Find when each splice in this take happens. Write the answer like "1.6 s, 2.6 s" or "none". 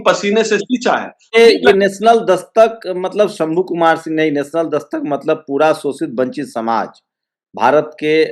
1.4 s